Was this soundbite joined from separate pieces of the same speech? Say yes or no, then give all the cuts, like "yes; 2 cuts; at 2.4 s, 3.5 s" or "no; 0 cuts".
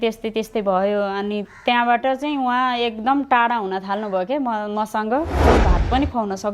yes; 1 cut; at 5.4 s